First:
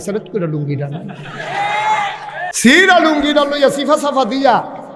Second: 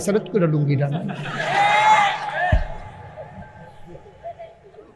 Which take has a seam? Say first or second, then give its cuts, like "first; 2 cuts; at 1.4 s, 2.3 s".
first; 1 cut; at 2.5 s